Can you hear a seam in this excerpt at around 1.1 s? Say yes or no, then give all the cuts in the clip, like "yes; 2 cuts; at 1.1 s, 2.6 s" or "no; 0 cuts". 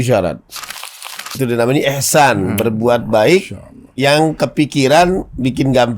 yes; 1 cut; at 1.1 s